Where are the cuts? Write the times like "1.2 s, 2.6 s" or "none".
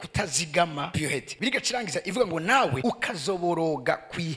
1.1 s, 2.8 s